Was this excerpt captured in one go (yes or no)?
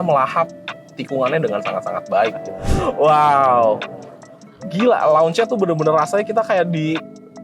no